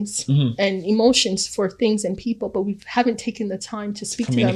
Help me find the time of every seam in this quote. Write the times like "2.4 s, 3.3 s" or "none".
none

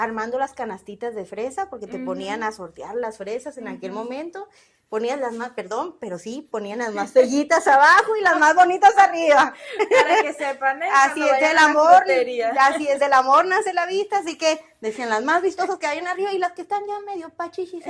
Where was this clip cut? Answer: none

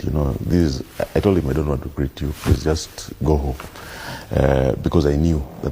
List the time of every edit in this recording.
3.6 s

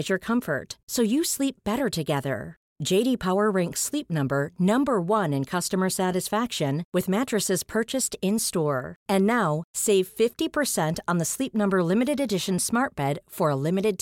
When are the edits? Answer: none

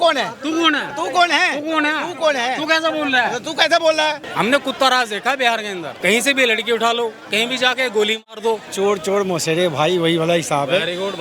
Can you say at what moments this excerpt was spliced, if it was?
4.2 s, 5.9 s, 8.7 s

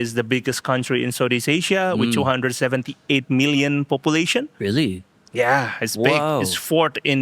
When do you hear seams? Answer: none

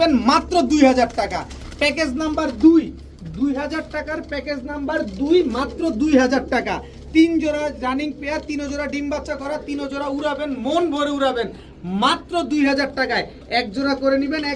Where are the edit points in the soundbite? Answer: none

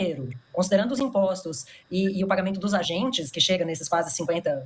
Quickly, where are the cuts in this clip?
none

